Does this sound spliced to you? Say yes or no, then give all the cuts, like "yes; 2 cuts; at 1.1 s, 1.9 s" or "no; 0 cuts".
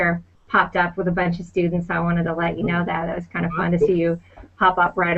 yes; 1 cut; at 4.1 s